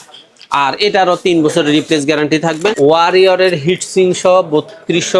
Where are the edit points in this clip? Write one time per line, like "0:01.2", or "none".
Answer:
0:02.7